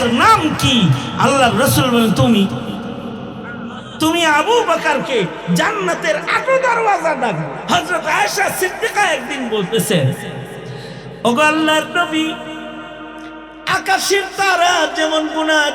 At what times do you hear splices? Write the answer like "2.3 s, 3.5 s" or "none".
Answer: 7.6 s